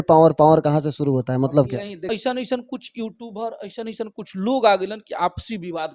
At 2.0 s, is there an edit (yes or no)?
yes